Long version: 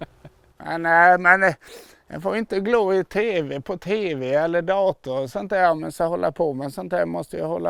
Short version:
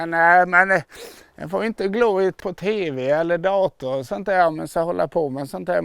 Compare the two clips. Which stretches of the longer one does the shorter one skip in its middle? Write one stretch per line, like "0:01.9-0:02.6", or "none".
0:03.1-0:03.6